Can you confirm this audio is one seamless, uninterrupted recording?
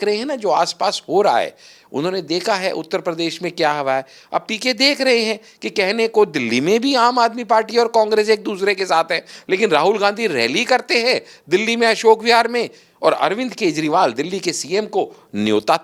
yes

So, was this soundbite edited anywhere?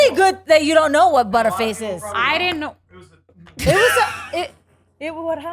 no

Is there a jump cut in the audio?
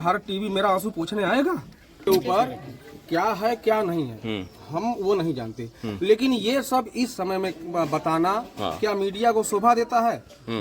yes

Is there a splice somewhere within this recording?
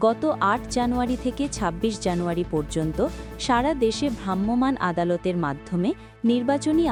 no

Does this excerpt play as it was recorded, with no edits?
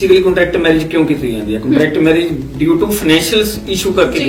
yes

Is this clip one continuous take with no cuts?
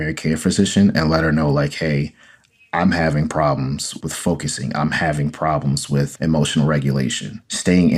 yes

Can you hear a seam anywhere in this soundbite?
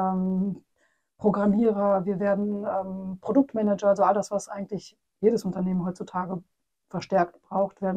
no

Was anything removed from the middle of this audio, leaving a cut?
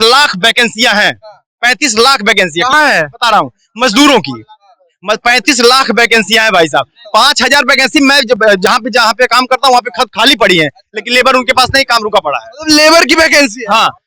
no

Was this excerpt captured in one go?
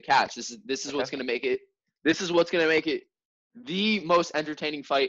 yes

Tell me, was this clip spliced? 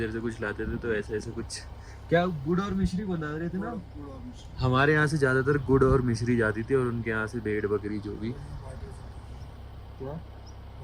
no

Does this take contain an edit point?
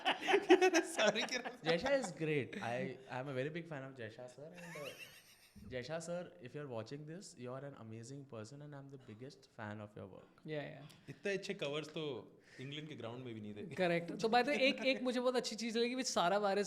no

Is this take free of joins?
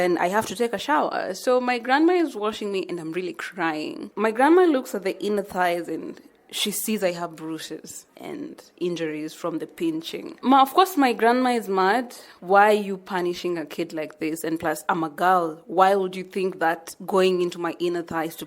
no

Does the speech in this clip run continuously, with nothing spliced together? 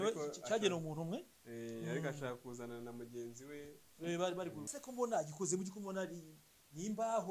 no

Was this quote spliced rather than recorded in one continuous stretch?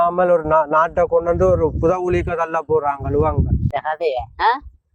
yes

